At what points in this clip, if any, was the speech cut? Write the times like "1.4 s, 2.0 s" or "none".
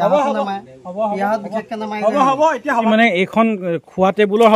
2.8 s